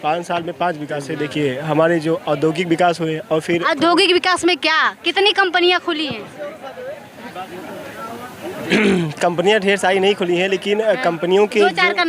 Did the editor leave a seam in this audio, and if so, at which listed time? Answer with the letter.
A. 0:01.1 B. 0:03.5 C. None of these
A